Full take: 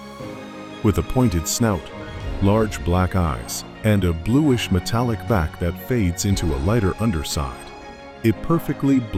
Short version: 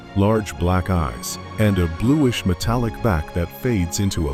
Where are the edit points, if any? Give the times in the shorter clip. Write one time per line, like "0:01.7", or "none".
none